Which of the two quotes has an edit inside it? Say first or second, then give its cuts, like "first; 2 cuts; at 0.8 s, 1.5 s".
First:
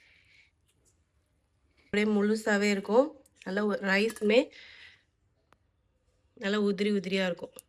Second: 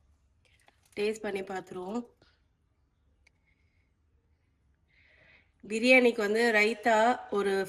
first; 1 cut; at 1.9 s